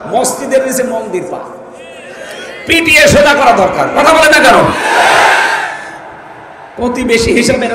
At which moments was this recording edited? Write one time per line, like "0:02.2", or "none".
none